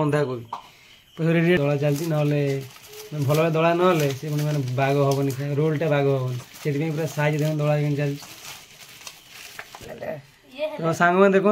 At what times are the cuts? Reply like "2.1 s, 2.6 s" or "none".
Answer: 1.6 s, 9.9 s